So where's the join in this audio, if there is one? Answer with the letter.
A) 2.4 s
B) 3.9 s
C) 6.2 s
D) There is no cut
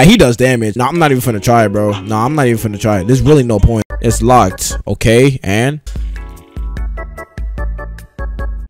B